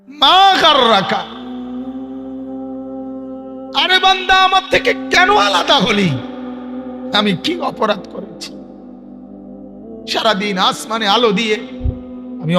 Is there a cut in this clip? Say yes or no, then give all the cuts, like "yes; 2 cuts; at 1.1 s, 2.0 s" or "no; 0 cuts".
yes; 2 cuts; at 1.3 s, 3.4 s